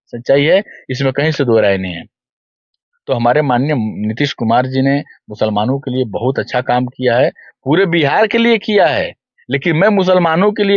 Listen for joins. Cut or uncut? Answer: uncut